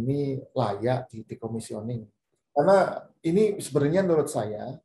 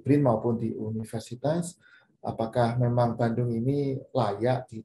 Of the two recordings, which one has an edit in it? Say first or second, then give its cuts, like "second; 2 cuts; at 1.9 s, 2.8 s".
first; 1 cut; at 2.3 s